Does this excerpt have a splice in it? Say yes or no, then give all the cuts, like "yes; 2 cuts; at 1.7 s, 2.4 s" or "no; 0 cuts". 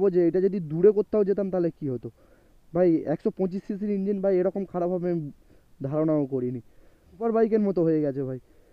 yes; 1 cut; at 7.2 s